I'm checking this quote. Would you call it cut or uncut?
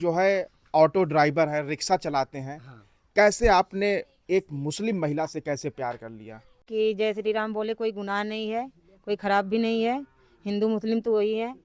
cut